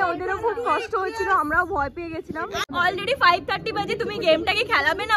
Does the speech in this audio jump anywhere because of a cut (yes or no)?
yes